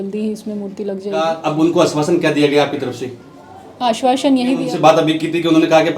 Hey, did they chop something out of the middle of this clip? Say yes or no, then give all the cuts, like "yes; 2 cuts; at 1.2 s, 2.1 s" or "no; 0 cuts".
yes; 2 cuts; at 1.3 s, 4.6 s